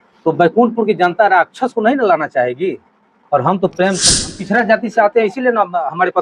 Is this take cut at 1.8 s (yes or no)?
no